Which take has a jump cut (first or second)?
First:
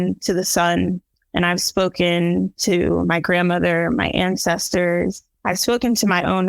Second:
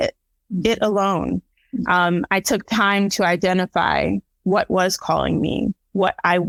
first